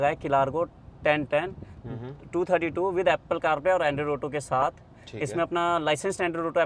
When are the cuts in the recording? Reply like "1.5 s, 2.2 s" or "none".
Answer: none

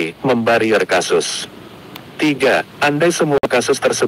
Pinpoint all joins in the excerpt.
2.7 s

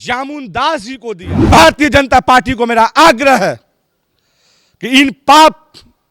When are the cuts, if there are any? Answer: 1.5 s

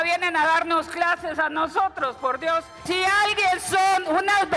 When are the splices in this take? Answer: 2.8 s

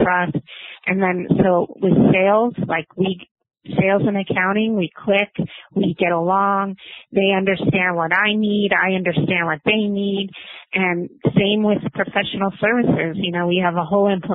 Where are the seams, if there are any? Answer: none

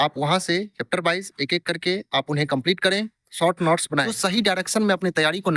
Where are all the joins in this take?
3.2 s, 4.2 s

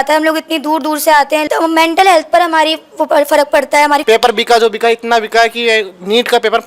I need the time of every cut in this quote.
1.4 s, 4.0 s

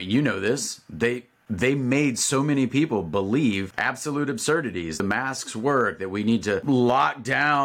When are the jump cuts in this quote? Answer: 3.7 s, 5.0 s, 6.6 s

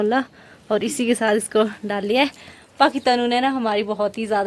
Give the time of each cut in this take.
none

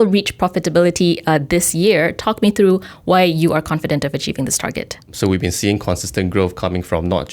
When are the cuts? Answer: 5.1 s

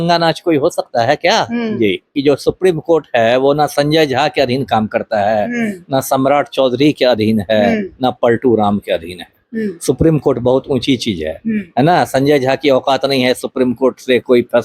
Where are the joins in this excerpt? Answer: 2.1 s

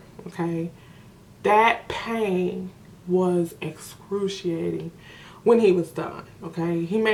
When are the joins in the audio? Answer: none

